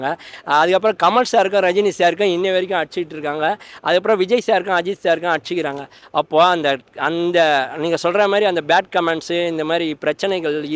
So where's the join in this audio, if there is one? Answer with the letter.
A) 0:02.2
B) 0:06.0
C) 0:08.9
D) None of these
D